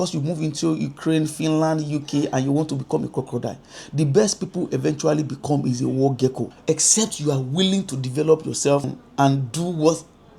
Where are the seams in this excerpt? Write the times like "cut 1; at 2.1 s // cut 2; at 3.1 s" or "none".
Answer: cut 1; at 6.5 s // cut 2; at 9.0 s